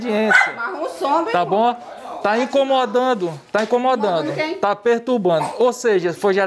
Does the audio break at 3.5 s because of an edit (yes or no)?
no